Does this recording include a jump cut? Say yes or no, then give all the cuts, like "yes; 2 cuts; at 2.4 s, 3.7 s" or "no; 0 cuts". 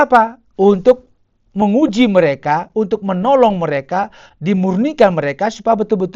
no; 0 cuts